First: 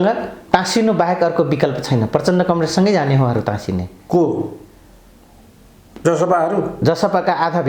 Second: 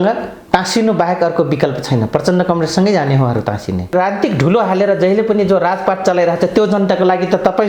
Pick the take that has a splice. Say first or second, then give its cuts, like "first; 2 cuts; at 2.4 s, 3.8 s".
second; 1 cut; at 3.9 s